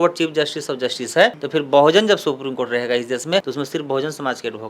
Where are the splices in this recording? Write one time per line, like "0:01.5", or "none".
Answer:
0:03.5